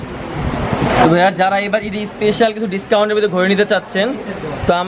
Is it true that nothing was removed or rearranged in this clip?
yes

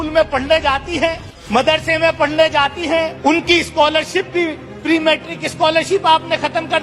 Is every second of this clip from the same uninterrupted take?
no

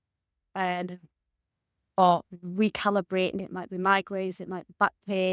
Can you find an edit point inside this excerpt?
yes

